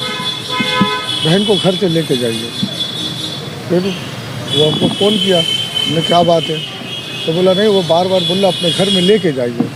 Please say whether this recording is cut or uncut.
uncut